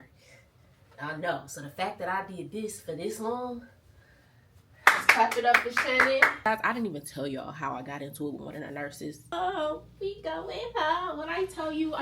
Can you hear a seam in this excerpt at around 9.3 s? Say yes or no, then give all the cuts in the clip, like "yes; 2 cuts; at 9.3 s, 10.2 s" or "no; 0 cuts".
yes; 2 cuts; at 6.5 s, 9.3 s